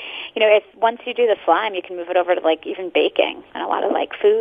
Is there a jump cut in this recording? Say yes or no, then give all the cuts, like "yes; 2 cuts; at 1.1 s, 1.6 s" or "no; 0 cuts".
yes; 1 cut; at 3.5 s